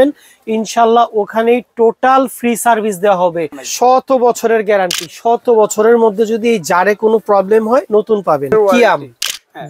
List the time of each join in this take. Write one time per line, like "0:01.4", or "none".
0:03.6
0:08.6